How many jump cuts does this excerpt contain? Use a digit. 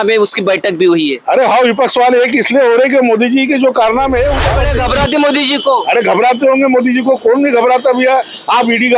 1